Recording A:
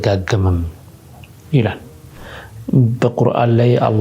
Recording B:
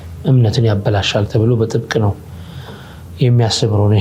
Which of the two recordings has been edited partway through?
A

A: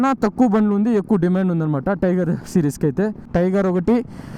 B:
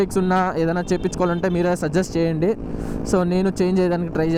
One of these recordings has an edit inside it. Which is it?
A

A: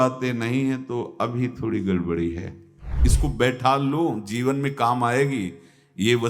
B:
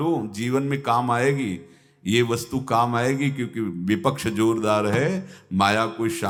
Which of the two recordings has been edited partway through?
A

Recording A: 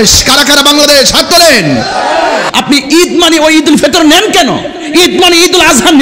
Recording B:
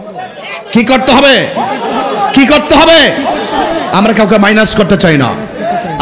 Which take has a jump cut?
A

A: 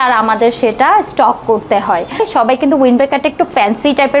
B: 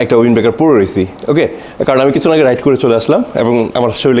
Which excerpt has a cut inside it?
A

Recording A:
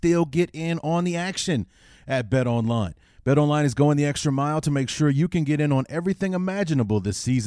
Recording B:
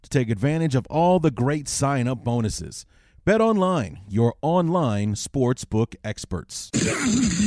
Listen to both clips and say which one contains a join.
B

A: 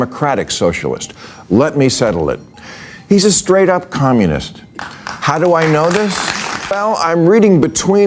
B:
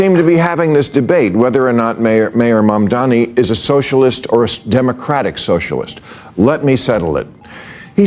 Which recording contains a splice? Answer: A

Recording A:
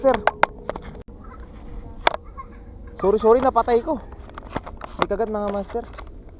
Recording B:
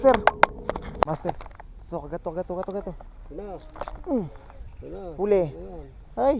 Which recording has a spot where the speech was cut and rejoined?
B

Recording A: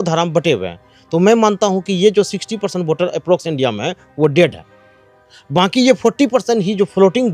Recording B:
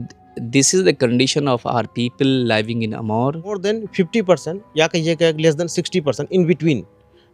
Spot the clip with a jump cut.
B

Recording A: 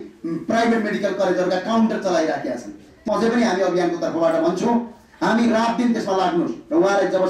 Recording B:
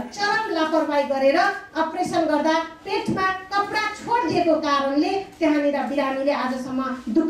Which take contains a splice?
A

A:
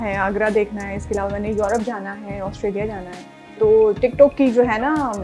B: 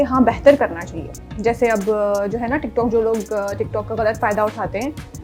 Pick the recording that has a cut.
A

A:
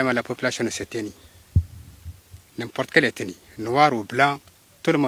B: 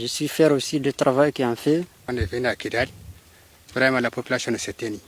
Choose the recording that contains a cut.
B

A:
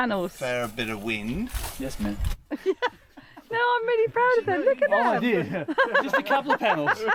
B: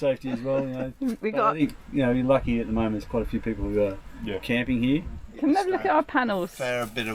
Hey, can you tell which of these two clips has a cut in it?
B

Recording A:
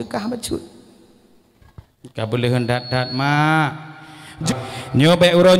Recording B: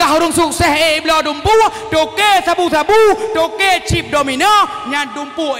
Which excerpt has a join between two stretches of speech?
A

